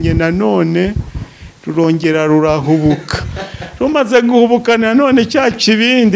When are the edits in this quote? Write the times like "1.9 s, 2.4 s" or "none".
none